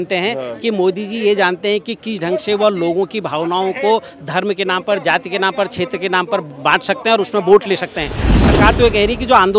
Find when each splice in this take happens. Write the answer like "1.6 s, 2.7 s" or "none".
8.4 s